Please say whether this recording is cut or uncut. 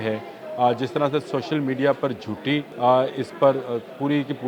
cut